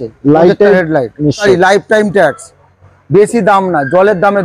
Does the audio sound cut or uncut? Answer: cut